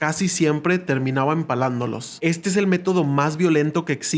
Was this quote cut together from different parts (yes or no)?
no